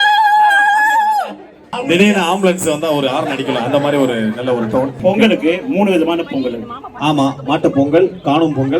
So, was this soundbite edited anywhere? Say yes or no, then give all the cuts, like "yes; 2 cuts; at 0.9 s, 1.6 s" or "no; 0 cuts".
yes; 2 cuts; at 1.7 s, 5.0 s